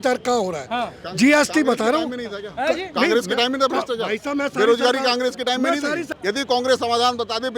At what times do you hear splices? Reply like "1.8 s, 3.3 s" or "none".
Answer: 6.1 s